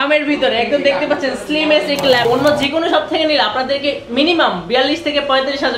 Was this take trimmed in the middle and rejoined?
yes; 1 cut; at 2.3 s

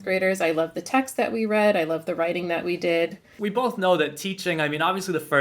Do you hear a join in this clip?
yes; 1 cut; at 3.3 s

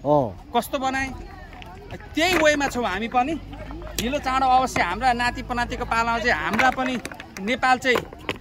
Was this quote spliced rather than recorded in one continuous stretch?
no; 0 cuts

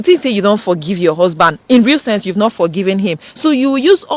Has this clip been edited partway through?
no; 0 cuts

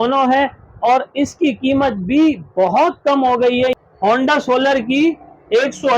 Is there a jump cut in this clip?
yes; 1 cut; at 3.7 s

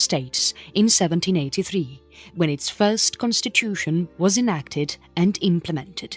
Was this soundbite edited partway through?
no; 0 cuts

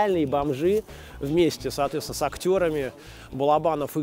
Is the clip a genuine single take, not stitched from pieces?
yes; 0 cuts

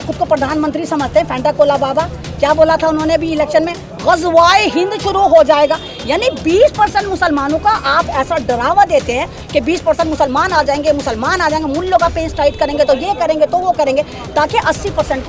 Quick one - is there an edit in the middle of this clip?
no; 0 cuts

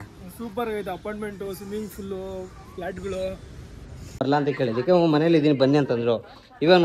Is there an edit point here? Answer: yes; 1 cut; at 4.2 s

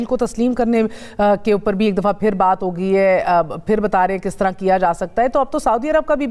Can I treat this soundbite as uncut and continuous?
yes; 0 cuts

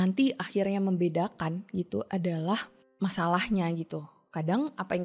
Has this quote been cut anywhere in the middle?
yes; 1 cut; at 2.8 s

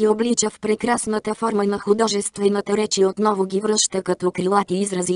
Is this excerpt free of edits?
yes; 0 cuts

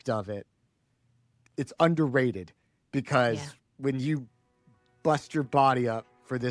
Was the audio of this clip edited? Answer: yes; 1 cut; at 1.3 s

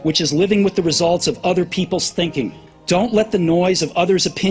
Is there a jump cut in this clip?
yes; 1 cut; at 2.7 s

